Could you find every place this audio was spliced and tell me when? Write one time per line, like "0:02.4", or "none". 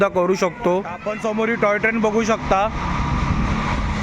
0:01.1